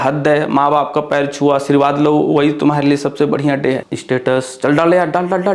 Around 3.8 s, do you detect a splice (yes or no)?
yes